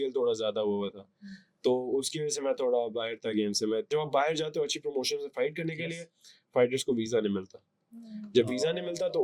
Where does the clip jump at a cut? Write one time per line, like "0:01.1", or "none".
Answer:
0:03.9